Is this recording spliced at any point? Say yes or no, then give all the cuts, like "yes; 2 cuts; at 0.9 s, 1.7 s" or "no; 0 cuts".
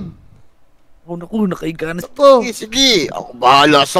yes; 1 cut; at 2.0 s